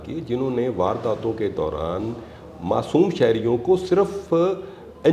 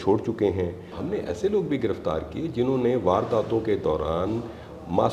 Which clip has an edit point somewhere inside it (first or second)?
second